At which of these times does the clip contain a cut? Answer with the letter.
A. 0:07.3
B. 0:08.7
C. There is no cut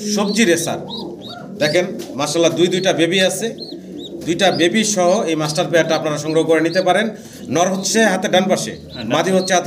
C